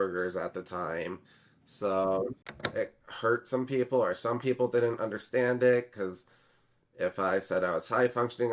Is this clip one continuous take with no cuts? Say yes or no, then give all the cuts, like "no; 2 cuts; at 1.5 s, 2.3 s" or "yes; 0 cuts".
no; 1 cut; at 2.3 s